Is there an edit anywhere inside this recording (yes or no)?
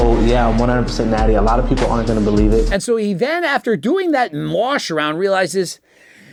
no